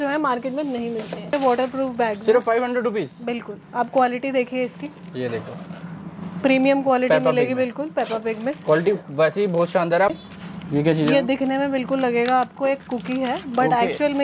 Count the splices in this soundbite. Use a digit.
2